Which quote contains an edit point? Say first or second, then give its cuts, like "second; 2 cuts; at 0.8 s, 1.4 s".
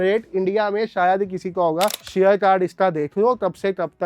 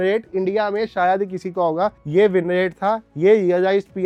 first; 1 cut; at 2.0 s